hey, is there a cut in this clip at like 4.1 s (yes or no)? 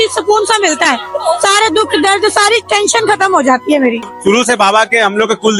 yes